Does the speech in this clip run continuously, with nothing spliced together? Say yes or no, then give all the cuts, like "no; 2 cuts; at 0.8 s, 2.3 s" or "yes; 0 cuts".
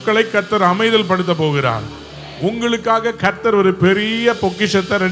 yes; 0 cuts